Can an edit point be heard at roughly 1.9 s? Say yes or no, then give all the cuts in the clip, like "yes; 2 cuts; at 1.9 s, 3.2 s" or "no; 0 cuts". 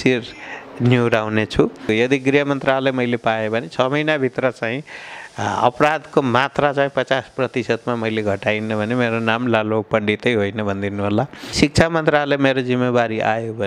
yes; 2 cuts; at 1.9 s, 11.5 s